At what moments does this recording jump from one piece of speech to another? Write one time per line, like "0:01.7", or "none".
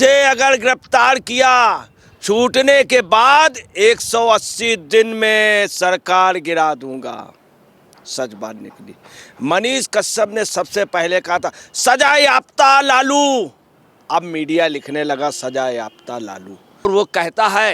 0:16.8